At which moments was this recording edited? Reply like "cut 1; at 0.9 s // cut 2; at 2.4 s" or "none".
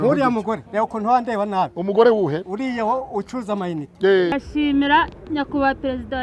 cut 1; at 4.3 s